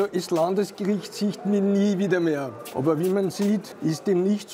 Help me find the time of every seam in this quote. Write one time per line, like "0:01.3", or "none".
0:02.6
0:03.7